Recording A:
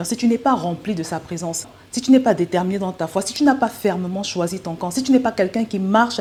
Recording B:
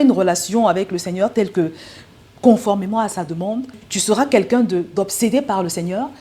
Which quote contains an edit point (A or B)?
B